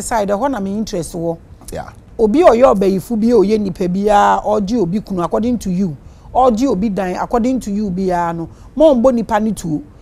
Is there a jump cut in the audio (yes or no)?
yes